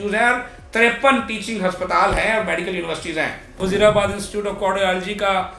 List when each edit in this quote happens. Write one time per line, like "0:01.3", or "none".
0:03.6

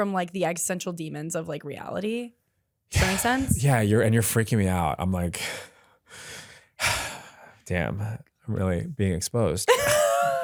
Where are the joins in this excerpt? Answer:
none

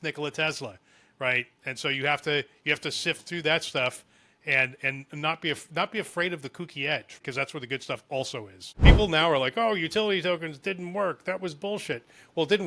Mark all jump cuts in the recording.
0:07.2
0:08.7

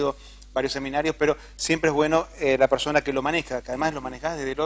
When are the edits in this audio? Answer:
0:02.3

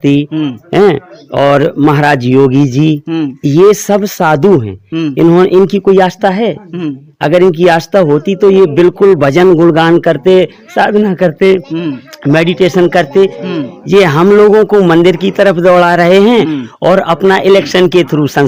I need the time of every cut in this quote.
none

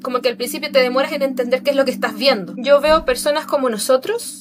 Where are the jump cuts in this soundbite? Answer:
0:02.5

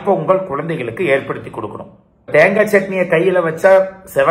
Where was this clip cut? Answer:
0:02.3

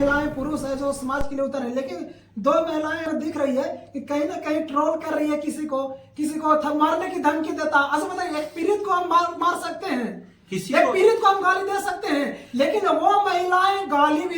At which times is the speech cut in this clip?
0:03.1

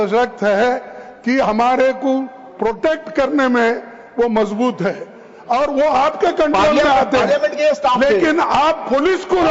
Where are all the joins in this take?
none

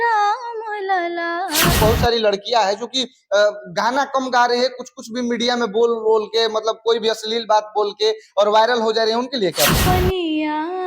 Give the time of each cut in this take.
0:01.7
0:09.8

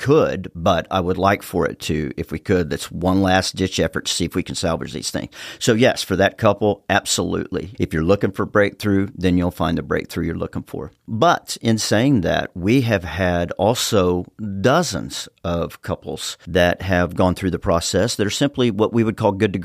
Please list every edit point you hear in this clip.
0:07.7

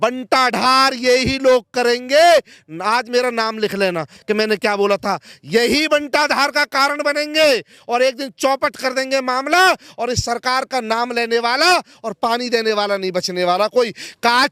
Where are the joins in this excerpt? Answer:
none

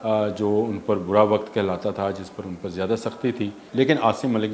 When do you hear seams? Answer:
0:03.6

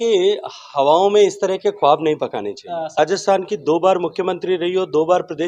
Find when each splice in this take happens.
0:03.0

